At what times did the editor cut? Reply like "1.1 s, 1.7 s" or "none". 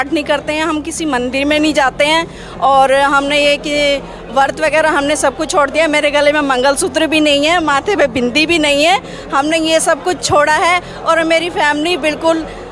none